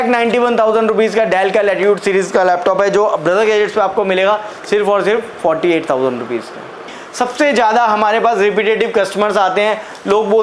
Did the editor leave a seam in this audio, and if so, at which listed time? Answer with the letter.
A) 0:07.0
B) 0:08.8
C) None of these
A